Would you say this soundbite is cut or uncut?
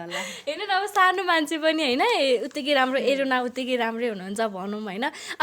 uncut